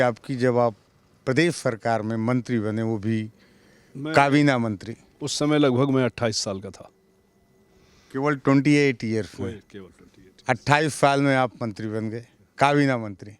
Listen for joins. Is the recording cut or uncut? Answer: uncut